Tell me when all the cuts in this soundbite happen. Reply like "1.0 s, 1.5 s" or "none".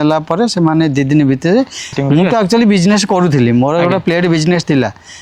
1.9 s